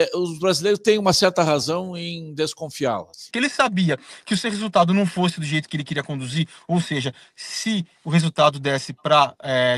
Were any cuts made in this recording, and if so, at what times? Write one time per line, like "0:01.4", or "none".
0:03.3